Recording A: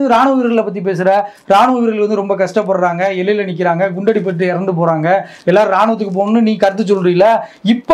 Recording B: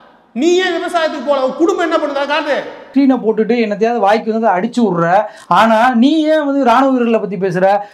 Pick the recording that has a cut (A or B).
B